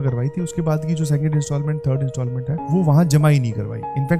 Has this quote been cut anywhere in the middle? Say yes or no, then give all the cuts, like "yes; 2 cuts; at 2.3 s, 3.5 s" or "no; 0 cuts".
no; 0 cuts